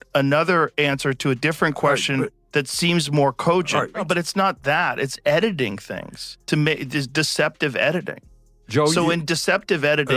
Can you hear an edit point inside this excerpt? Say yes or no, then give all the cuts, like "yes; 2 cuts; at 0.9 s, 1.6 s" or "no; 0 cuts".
yes; 1 cut; at 4.0 s